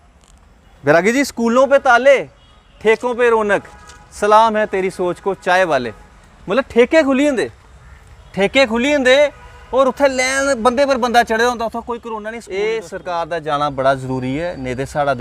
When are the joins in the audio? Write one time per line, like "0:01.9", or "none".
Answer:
0:12.0